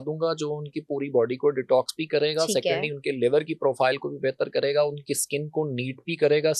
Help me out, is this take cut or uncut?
uncut